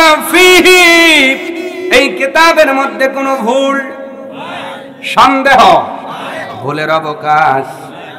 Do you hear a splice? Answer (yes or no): no